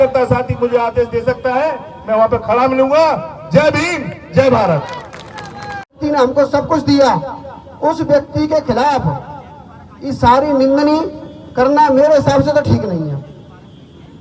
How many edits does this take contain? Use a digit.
1